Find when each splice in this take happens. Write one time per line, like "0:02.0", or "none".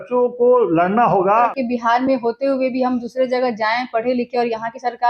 0:01.6